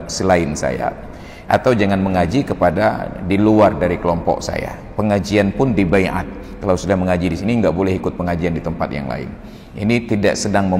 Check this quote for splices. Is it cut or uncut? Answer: uncut